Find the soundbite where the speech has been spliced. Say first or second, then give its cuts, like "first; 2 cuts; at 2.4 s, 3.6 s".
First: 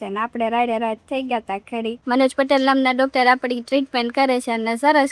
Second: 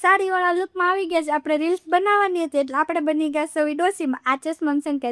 first; 1 cut; at 2.0 s